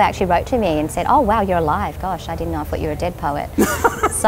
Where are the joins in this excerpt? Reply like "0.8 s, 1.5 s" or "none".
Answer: none